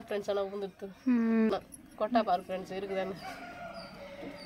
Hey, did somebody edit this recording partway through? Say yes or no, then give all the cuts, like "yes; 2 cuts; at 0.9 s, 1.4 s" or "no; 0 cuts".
yes; 1 cut; at 1.5 s